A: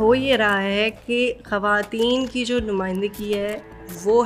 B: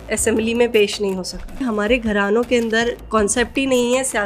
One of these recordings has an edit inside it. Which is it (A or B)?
B